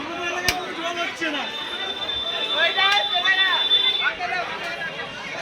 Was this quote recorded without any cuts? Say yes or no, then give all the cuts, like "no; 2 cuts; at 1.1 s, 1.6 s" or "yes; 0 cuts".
yes; 0 cuts